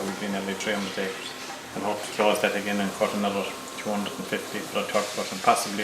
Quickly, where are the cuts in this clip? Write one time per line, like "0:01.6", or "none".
0:00.9